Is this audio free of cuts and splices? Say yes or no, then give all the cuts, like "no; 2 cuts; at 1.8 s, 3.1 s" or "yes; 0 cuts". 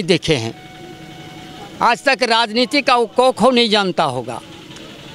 yes; 0 cuts